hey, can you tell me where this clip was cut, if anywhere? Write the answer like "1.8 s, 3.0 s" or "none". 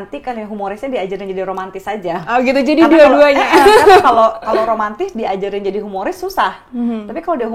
none